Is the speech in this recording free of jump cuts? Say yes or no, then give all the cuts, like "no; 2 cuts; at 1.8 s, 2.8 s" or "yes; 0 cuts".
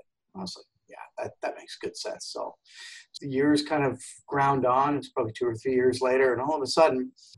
no; 1 cut; at 3.1 s